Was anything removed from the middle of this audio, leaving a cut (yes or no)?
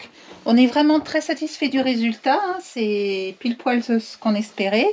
no